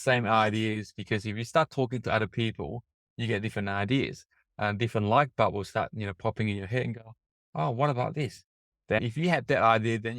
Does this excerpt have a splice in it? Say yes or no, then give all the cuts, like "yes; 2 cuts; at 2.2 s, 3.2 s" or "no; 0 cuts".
yes; 1 cut; at 9.0 s